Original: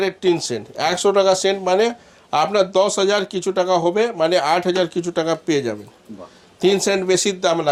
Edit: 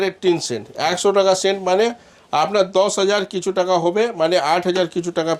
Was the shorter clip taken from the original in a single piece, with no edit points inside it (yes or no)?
yes